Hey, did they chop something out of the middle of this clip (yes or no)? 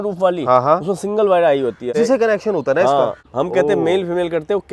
yes